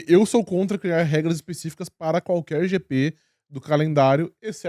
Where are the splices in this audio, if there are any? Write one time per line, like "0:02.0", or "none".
none